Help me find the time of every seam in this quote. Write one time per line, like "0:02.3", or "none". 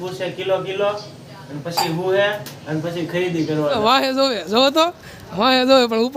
0:03.8